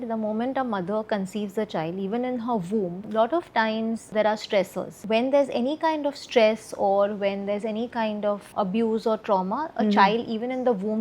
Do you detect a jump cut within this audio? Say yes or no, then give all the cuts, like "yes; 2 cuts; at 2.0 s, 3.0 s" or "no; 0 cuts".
yes; 4 cuts; at 3.0 s, 4.1 s, 4.9 s, 8.5 s